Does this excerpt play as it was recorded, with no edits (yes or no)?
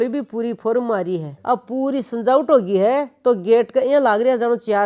yes